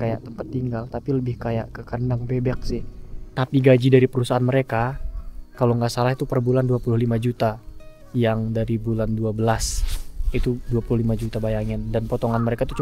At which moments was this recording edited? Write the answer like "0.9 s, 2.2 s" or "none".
3.2 s